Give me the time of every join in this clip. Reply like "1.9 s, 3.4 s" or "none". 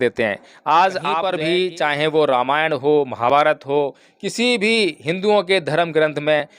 1.2 s